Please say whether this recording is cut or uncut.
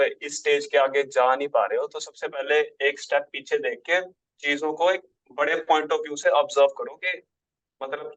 uncut